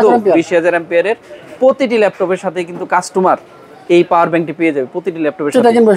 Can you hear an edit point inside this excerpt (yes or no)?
no